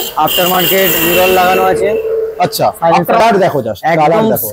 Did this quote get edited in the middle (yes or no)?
yes